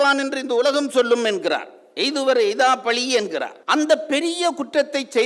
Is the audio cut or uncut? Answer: cut